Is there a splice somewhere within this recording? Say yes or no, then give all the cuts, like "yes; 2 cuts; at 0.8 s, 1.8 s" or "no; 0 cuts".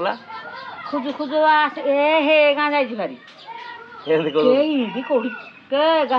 no; 0 cuts